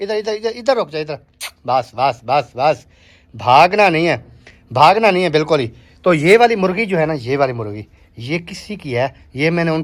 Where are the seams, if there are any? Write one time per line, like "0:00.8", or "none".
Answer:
none